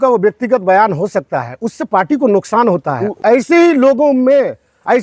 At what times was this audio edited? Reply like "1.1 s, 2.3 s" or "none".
3.0 s